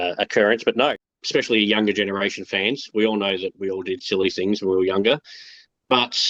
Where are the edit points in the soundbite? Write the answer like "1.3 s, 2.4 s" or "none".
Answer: 1.1 s